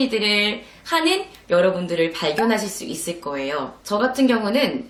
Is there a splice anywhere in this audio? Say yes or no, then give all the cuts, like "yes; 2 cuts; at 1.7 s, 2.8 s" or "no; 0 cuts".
no; 0 cuts